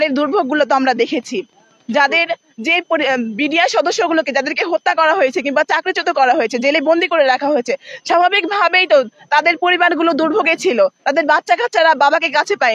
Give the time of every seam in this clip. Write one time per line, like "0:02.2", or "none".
none